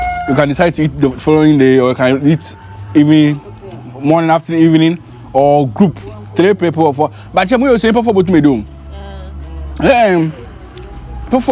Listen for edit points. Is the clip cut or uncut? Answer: uncut